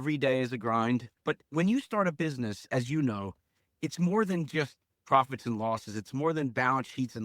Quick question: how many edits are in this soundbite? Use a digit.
1